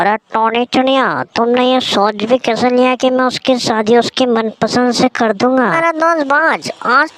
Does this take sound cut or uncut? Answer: cut